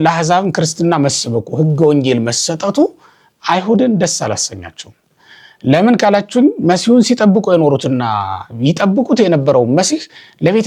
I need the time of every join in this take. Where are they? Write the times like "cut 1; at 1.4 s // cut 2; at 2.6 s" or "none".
none